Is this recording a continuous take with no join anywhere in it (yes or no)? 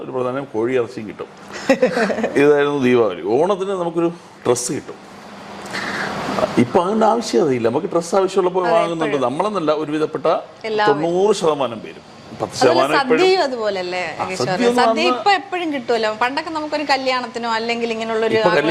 yes